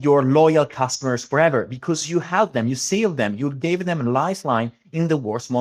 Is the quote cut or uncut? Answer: uncut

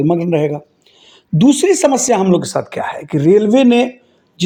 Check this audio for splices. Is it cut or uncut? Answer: uncut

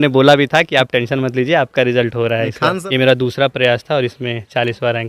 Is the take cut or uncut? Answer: cut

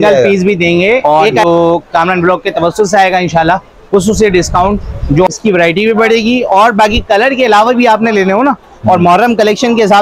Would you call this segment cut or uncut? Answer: cut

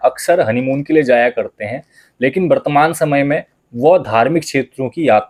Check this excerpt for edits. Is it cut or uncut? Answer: uncut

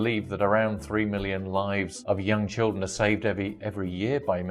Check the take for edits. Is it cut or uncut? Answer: cut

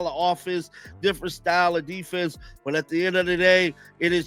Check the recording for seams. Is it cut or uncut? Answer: uncut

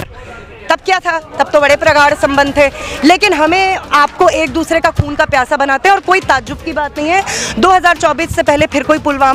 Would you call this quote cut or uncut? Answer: uncut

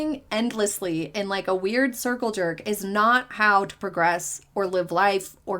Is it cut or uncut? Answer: uncut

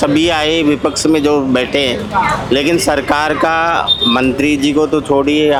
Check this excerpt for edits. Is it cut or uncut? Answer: uncut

